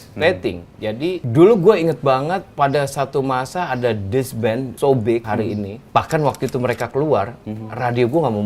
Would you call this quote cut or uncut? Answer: cut